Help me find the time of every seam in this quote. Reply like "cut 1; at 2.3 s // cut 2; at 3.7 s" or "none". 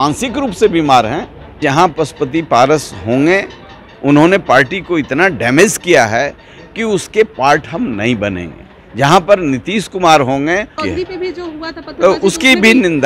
cut 1; at 1.6 s // cut 2; at 10.8 s